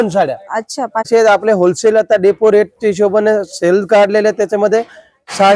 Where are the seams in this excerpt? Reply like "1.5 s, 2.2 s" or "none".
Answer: 1.1 s